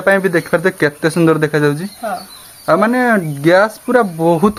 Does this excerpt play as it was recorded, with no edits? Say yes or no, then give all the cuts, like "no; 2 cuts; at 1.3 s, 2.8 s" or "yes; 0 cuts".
yes; 0 cuts